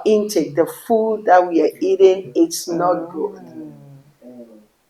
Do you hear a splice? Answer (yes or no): no